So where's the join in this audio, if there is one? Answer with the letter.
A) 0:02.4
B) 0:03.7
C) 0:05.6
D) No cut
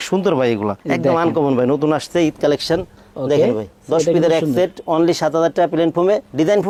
D